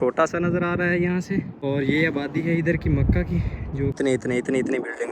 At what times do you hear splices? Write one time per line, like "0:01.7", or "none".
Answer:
0:01.5
0:04.0